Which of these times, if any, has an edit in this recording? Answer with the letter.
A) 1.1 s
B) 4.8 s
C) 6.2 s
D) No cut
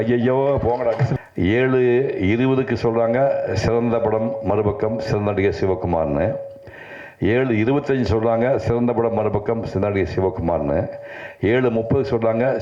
A